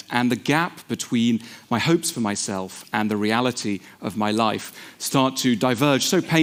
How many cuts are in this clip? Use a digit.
0